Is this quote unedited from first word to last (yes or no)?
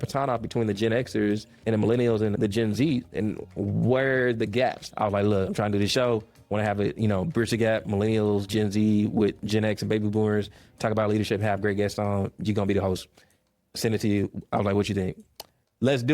no